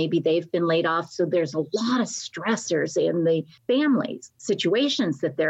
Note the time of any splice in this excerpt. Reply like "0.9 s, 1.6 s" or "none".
3.5 s, 4.3 s